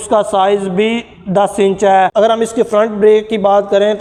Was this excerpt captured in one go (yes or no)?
yes